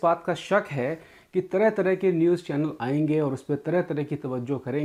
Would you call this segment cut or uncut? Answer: uncut